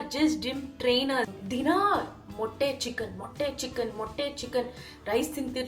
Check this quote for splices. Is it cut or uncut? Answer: cut